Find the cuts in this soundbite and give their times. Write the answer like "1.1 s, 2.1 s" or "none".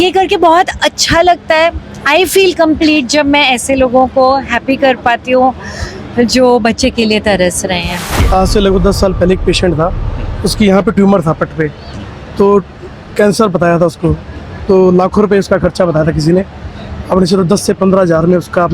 8.2 s